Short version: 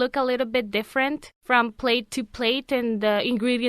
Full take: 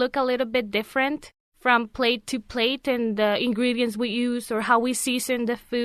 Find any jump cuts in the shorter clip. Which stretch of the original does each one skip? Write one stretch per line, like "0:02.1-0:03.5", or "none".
0:01.3-0:01.5

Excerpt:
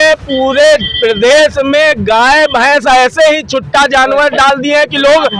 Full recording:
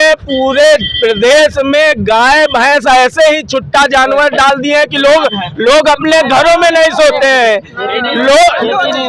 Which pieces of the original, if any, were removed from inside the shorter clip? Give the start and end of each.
none

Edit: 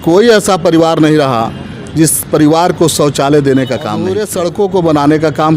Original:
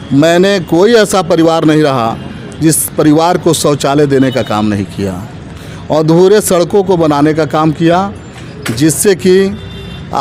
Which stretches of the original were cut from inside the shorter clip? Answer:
0:04.7-0:06.2

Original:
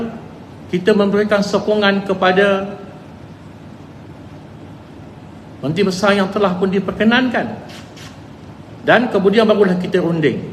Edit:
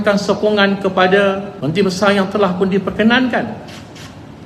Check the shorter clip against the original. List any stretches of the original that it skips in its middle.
0:02.8-0:05.5

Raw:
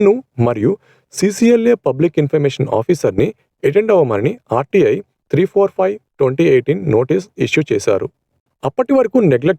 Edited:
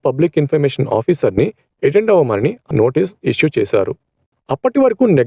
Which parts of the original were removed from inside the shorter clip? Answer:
0:04.5-0:06.8

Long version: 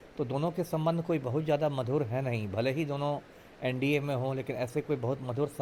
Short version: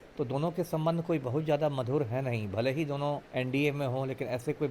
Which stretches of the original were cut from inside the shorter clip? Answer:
0:03.2-0:03.5

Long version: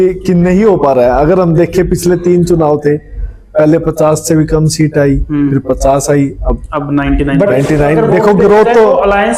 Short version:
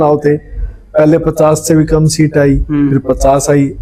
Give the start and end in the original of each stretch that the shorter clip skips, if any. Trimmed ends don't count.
none

